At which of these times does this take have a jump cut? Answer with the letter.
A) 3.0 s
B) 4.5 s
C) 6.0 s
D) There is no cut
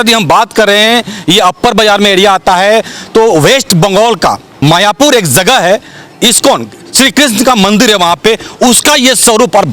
B